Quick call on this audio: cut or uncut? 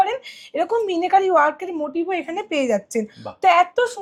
uncut